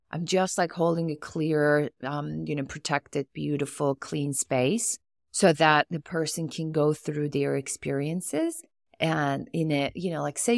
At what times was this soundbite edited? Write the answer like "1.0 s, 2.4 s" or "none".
none